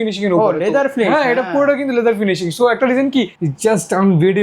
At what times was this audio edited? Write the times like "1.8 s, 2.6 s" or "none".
3.4 s